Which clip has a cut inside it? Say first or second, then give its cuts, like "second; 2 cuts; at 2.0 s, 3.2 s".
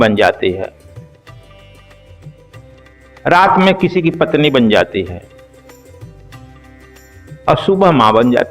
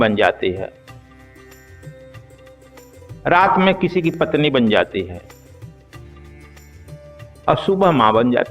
first; 2 cuts; at 0.7 s, 2.9 s